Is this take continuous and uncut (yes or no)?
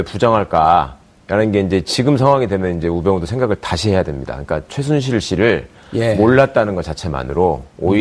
no